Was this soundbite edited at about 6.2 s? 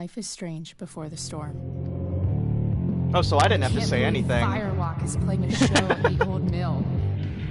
no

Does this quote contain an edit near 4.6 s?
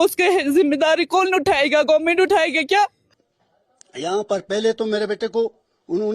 no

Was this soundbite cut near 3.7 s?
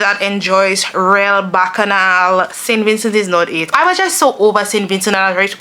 yes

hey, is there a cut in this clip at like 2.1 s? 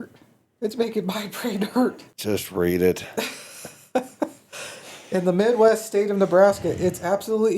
yes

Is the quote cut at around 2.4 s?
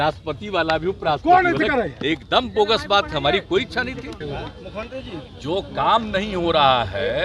no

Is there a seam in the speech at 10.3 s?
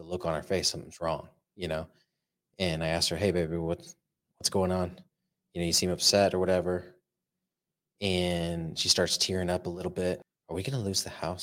yes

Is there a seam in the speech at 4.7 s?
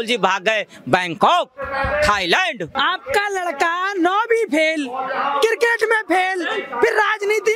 no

